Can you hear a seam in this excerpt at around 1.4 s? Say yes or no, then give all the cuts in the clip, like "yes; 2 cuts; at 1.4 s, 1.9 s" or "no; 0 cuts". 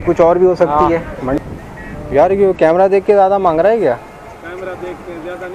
yes; 1 cut; at 1.4 s